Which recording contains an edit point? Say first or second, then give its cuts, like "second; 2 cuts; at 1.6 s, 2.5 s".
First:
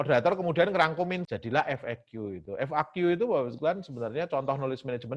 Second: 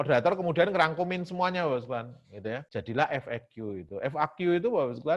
first; 1 cut; at 1.2 s